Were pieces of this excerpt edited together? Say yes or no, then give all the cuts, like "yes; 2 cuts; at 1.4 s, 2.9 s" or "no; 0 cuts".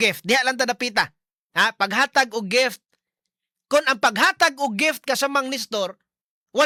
no; 0 cuts